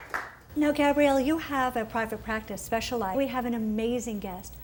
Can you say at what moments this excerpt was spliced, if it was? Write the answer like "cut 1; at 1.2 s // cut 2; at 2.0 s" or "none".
none